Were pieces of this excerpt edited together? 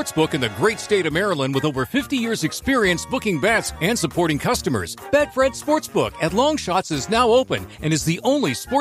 no; 0 cuts

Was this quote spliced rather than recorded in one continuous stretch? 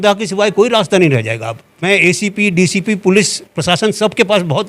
yes; 1 cut; at 1.7 s

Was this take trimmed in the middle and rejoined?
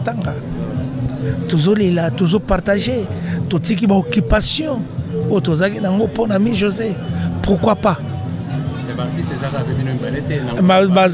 no; 0 cuts

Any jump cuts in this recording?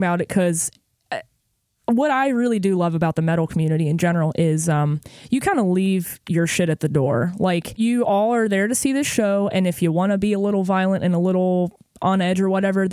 yes; 1 cut; at 7.7 s

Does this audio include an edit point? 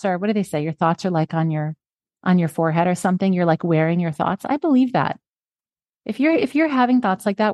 no; 0 cuts

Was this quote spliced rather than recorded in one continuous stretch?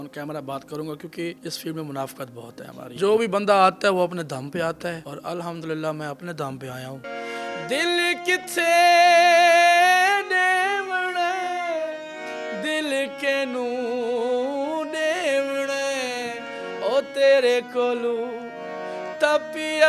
yes; 4 cuts; at 1.4 s, 2.9 s, 5.0 s, 7.1 s

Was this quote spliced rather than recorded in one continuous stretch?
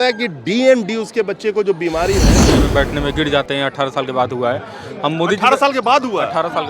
yes; 1 cut; at 2.5 s

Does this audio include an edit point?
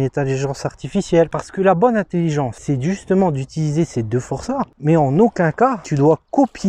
yes; 2 cuts; at 1.3 s, 4.7 s

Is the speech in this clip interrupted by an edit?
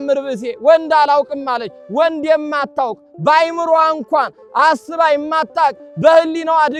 no; 0 cuts

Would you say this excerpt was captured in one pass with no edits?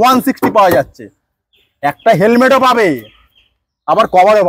yes; 0 cuts

